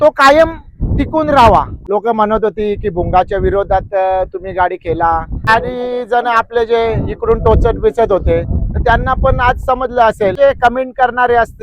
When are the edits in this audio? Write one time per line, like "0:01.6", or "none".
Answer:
0:01.8
0:05.5
0:10.3